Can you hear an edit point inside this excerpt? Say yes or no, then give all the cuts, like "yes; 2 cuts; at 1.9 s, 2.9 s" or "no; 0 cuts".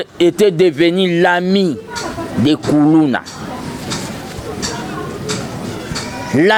no; 0 cuts